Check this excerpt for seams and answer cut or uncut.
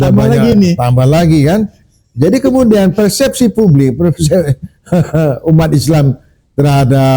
uncut